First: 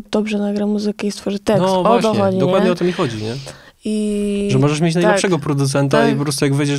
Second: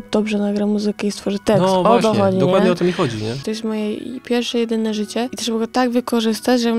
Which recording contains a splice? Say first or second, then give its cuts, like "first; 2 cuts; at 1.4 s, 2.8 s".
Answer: second; 2 cuts; at 3.4 s, 5.4 s